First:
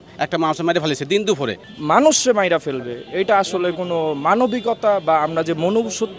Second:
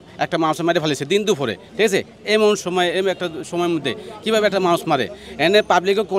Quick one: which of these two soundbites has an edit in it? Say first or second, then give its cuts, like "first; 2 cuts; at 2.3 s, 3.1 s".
first; 1 cut; at 1.6 s